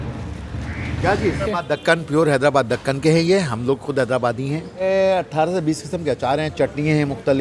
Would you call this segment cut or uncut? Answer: cut